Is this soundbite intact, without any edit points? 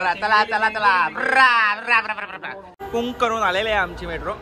no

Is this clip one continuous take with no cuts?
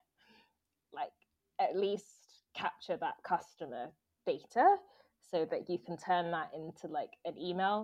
yes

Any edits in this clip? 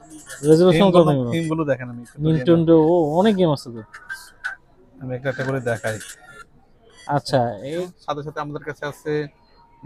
yes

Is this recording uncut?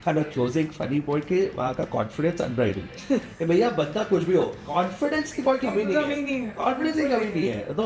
yes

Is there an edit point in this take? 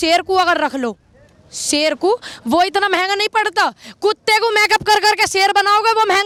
no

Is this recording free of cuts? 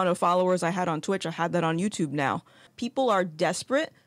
no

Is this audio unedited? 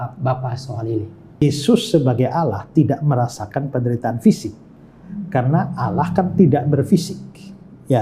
no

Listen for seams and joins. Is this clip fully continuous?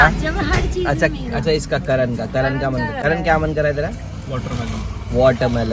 yes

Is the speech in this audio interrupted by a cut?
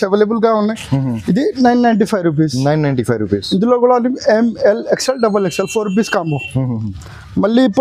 no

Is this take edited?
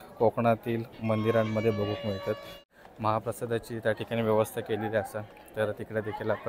yes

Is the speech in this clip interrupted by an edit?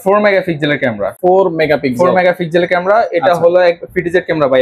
no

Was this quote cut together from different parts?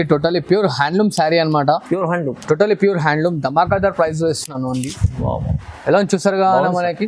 no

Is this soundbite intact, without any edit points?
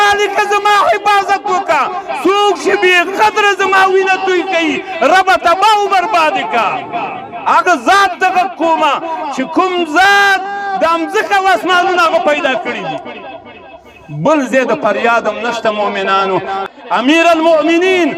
no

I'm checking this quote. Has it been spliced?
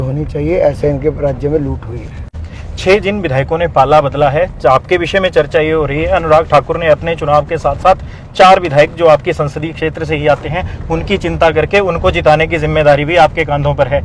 no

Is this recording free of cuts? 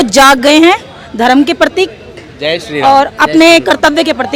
yes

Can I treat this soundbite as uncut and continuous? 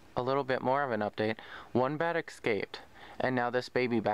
yes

